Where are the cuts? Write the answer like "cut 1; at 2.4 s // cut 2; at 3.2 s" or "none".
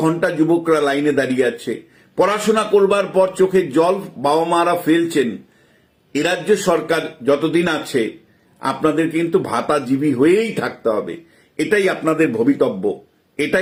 none